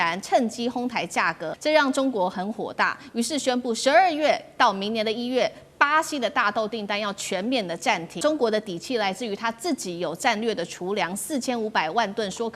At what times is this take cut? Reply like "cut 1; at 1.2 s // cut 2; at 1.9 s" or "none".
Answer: cut 1; at 1.5 s // cut 2; at 8.2 s